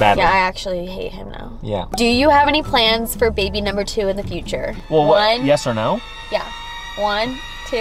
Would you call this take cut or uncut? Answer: cut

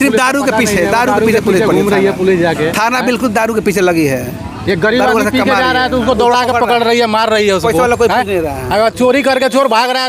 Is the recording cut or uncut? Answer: uncut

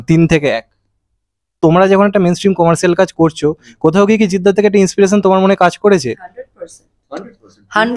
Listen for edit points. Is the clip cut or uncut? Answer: cut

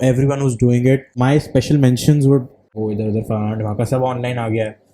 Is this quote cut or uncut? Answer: cut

